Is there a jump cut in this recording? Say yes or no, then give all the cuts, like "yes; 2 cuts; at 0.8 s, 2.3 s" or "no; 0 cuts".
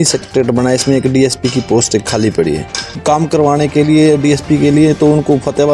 yes; 1 cut; at 2.9 s